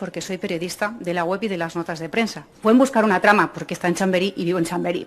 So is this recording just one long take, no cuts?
no; 1 cut; at 2.5 s

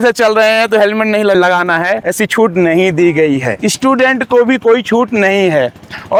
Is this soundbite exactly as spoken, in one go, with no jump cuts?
yes; 0 cuts

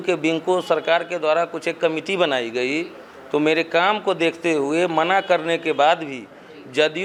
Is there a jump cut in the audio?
no; 0 cuts

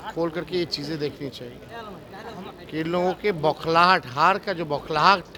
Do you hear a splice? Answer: no; 0 cuts

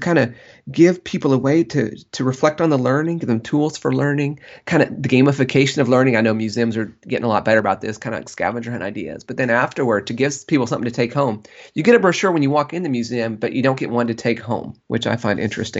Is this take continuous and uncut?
no; 1 cut; at 14.7 s

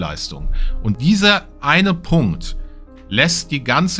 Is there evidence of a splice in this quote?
yes; 1 cut; at 0.9 s

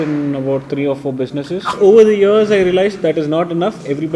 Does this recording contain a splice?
yes; 1 cut; at 1.7 s

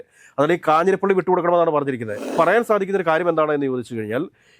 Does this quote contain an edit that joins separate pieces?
yes; 1 cut; at 2.2 s

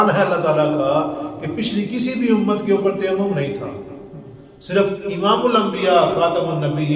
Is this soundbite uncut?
yes; 0 cuts

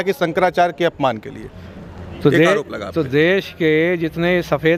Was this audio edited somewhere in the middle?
no; 0 cuts

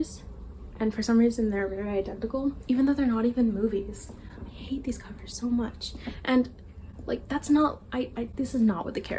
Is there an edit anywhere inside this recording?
no; 0 cuts

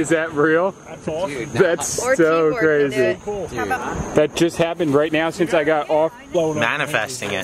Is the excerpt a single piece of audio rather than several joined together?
no; 2 cuts; at 3.8 s, 6.2 s

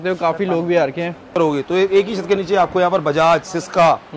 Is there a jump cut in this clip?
yes; 1 cut; at 1.3 s

